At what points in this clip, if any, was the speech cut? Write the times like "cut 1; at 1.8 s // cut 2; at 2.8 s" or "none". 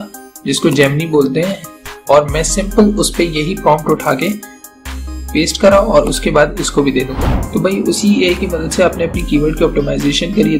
cut 1; at 7.1 s